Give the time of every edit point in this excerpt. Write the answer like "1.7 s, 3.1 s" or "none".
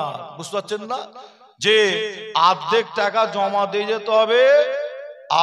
none